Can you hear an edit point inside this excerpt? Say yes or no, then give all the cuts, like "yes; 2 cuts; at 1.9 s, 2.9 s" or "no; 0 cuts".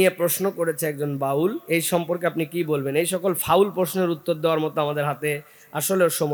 no; 0 cuts